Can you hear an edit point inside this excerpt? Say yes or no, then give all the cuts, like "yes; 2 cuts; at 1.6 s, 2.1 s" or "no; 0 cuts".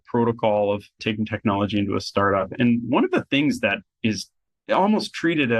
yes; 1 cut; at 2.5 s